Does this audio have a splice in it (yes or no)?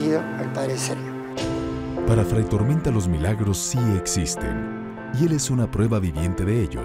no